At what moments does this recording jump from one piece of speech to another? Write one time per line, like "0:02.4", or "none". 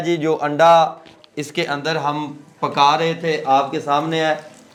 none